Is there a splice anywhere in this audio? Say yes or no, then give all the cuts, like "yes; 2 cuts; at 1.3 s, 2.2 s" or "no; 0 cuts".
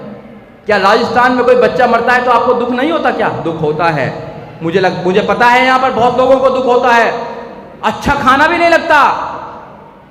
no; 0 cuts